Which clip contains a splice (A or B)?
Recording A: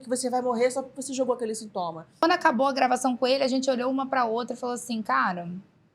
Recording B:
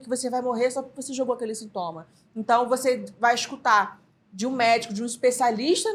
A